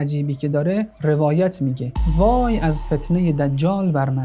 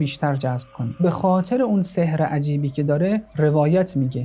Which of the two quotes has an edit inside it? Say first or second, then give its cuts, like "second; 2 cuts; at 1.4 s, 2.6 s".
second; 1 cut; at 1.0 s